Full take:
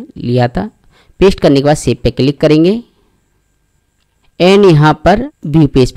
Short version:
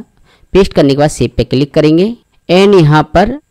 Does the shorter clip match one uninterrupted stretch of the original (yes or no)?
no